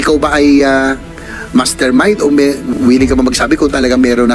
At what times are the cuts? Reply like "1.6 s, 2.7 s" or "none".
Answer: none